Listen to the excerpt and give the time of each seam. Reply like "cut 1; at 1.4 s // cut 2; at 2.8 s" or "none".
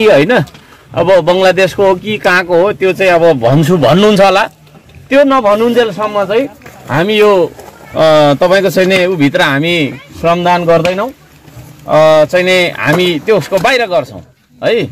none